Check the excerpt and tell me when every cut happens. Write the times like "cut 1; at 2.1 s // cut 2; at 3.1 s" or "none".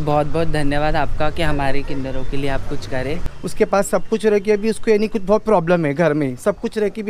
cut 1; at 3.2 s